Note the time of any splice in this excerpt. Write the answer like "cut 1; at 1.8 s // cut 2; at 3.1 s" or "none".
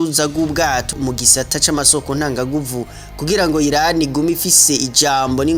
cut 1; at 0.9 s